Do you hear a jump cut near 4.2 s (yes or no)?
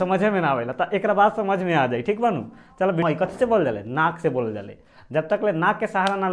no